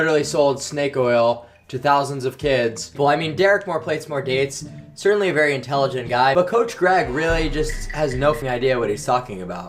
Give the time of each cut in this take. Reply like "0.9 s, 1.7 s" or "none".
2.9 s, 8.4 s